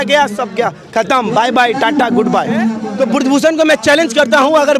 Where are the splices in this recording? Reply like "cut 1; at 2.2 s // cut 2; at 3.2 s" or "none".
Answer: cut 1; at 2.8 s